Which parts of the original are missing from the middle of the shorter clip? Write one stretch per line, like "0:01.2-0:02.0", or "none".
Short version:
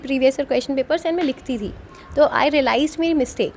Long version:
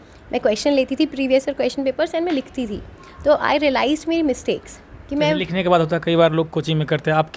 none

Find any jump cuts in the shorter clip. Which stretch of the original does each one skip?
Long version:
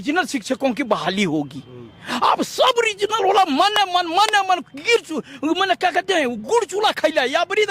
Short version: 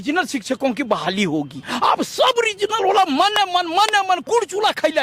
0:01.6-0:02.0
0:04.6-0:06.4

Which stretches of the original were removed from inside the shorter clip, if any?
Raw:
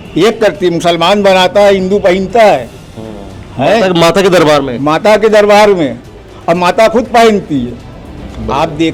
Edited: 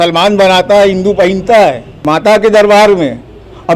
0:02.8-0:04.8

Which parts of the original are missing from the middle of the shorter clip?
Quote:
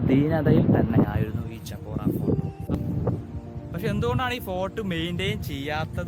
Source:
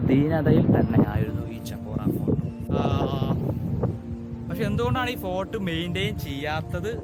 0:02.8-0:03.5

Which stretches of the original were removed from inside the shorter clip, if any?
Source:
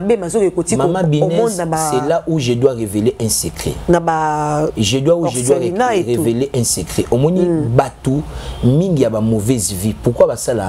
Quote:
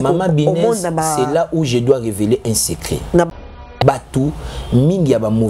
0:04.5-0:07.6

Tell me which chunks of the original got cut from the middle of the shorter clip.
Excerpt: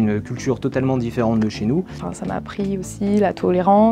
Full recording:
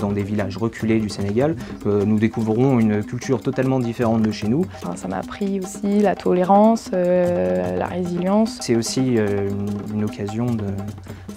none

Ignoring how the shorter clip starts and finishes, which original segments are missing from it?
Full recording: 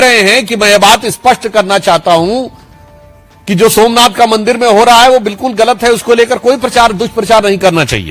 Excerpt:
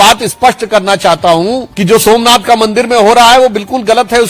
0:02.5-0:03.4

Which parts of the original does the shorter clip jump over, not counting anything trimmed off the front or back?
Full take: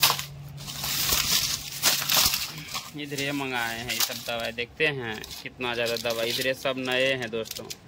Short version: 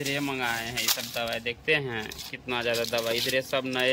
none

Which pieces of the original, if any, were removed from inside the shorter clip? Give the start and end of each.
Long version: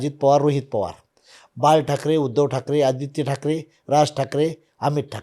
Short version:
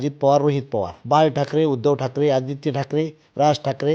0:00.9-0:01.5

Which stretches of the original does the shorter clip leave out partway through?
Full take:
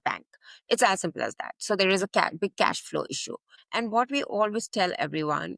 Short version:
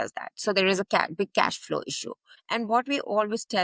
none

